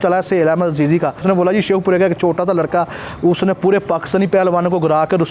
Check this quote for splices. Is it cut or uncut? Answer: cut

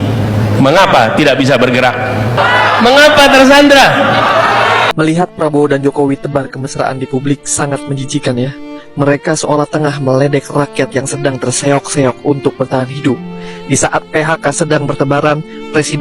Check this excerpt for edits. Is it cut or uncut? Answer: cut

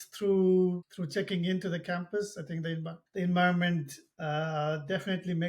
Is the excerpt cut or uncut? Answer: cut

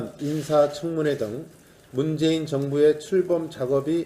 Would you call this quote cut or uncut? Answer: cut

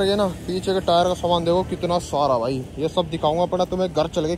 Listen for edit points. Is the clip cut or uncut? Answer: uncut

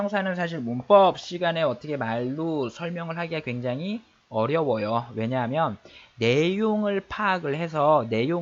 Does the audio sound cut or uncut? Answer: uncut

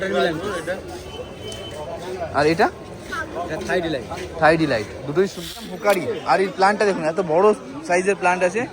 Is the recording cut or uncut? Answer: cut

